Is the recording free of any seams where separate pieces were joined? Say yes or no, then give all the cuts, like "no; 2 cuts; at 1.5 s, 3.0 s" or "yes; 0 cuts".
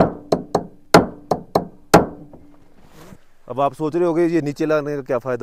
yes; 0 cuts